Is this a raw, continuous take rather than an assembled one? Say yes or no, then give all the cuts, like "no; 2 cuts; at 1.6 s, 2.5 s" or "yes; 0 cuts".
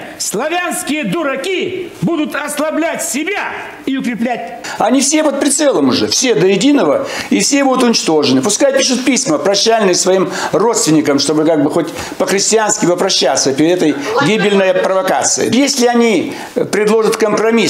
no; 1 cut; at 4.6 s